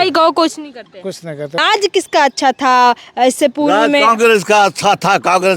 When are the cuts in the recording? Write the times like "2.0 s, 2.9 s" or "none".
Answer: 1.6 s